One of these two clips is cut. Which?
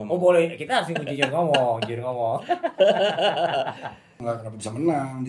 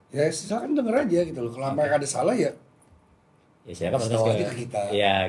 first; 1 cut; at 4.1 s

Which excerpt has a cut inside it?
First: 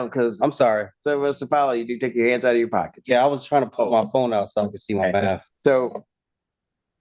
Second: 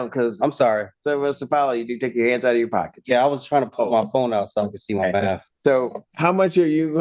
second; 1 cut; at 6.0 s

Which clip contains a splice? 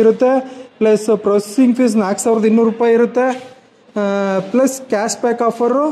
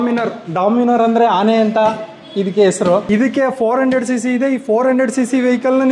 second; 1 cut; at 3.0 s

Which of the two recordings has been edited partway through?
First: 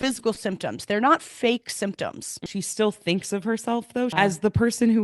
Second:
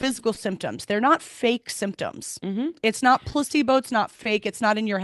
first; 2 cuts; at 2.4 s, 4.1 s

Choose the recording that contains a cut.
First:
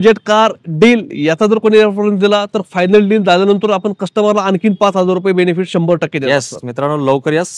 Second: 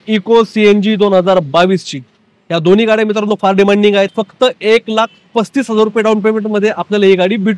second; 1 cut; at 4.1 s

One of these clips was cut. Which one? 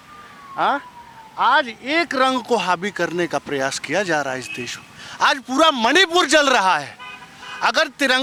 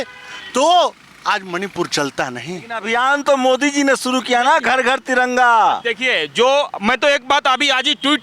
second; 1 cut; at 2.8 s

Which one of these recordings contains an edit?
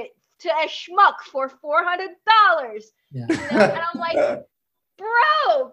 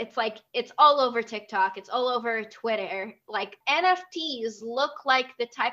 second; 1 cut; at 3.6 s

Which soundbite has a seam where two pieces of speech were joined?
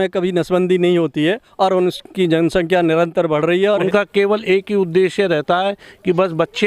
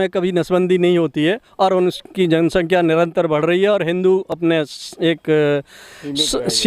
first; 1 cut; at 3.9 s

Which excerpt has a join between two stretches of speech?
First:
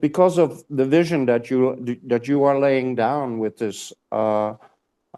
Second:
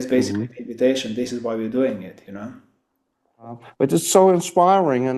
second; 1 cut; at 3.6 s

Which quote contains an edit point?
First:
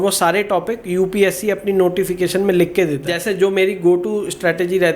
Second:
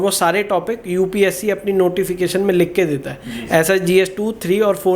first; 1 cut; at 3.1 s

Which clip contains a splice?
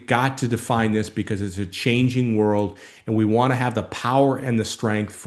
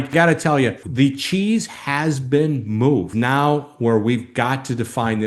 second; 2 cuts; at 0.8 s, 3.1 s

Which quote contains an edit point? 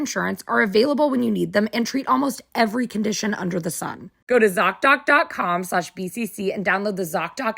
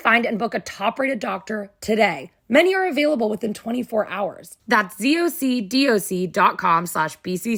first; 1 cut; at 4.1 s

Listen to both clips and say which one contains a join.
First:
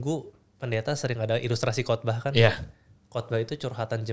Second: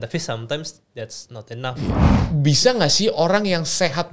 second; 1 cut; at 2.1 s

